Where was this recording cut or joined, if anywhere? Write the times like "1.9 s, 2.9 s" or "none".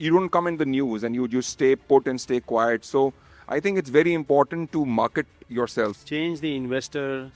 5.9 s